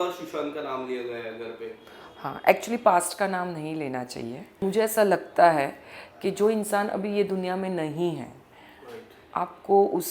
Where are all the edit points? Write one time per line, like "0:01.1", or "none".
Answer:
0:04.5